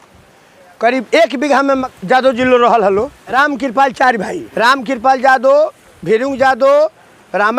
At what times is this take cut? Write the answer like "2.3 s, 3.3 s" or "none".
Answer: 1.9 s, 3.2 s, 4.4 s